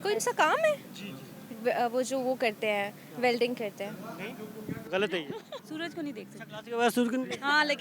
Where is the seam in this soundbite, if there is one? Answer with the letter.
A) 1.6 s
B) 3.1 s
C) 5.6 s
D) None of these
C